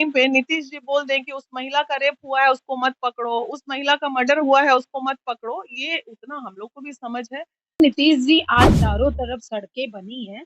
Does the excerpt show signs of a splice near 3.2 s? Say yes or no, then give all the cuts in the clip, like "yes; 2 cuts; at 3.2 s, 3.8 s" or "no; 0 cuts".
no; 1 cut; at 7.8 s